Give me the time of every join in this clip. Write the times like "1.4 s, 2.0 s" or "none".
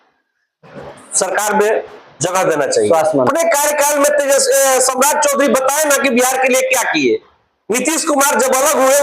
3.3 s